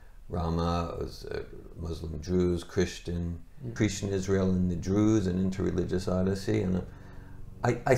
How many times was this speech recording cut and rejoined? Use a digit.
1